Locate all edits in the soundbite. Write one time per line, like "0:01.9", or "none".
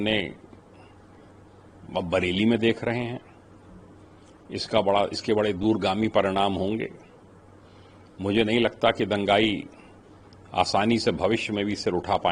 none